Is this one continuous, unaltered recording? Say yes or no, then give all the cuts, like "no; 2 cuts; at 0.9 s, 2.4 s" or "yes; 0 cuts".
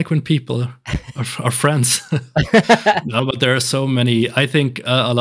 yes; 0 cuts